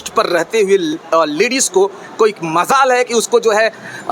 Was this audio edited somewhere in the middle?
no; 0 cuts

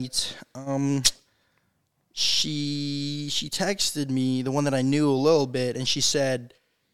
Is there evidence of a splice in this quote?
no; 0 cuts

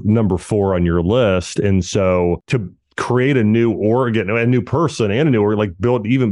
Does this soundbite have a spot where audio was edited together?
yes; 1 cut; at 2.4 s

